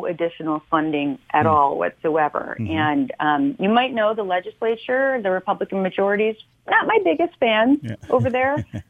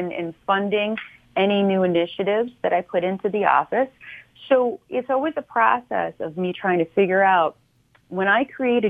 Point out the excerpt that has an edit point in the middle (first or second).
first